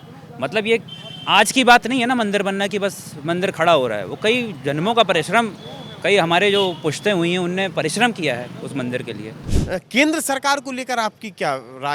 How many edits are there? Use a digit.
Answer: 1